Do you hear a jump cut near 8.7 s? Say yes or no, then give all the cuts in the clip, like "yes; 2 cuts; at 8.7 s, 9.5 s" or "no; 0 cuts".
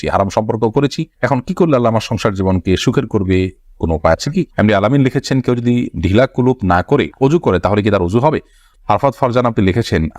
yes; 2 cuts; at 4.5 s, 8.7 s